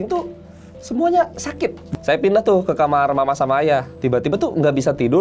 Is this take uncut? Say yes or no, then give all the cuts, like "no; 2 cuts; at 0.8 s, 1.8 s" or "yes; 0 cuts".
no; 1 cut; at 1.8 s